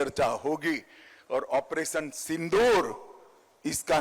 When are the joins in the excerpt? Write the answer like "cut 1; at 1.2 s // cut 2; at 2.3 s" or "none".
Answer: none